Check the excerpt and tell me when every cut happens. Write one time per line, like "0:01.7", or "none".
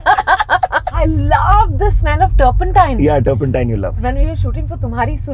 0:00.9
0:04.0